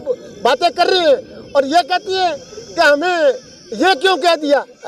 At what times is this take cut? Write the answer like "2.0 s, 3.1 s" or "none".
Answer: none